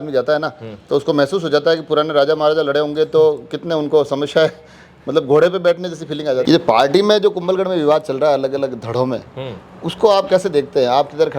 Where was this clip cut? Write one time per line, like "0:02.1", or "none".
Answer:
0:06.4